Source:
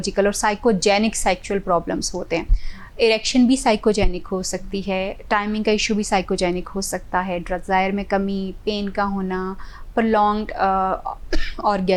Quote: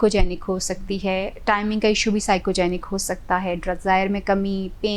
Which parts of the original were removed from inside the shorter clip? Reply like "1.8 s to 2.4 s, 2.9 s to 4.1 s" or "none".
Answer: none